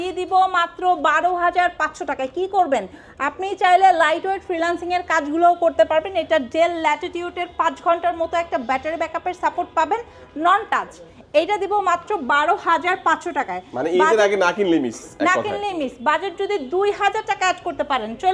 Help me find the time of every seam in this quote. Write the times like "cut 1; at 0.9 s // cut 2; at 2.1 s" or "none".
none